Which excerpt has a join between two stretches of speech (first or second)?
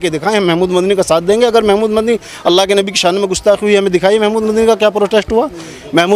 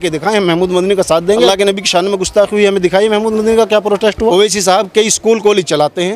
second